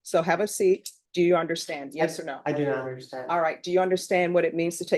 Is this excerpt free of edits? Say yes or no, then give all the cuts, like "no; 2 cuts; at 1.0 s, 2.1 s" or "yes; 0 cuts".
no; 1 cut; at 1.0 s